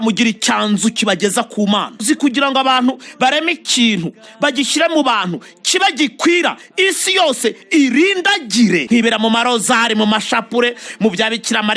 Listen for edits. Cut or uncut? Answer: cut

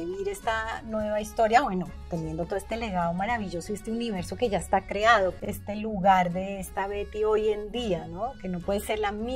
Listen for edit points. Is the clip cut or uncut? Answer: cut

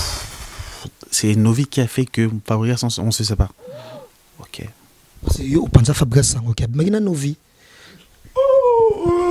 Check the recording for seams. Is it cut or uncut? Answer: uncut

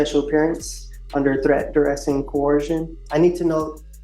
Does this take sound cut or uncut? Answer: cut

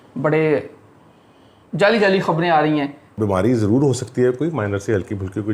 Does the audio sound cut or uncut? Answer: cut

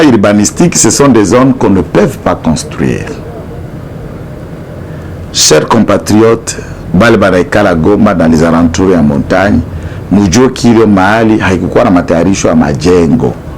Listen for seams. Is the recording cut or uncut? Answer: uncut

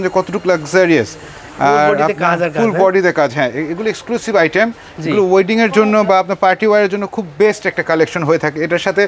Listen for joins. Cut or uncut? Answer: uncut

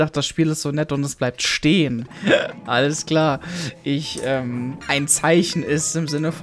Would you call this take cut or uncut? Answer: cut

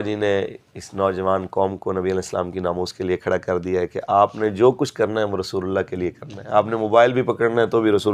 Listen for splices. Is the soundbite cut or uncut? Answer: uncut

